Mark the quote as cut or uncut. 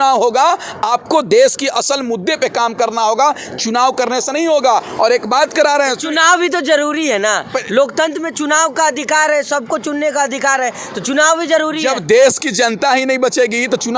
uncut